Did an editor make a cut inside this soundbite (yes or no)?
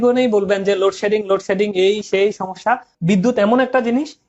yes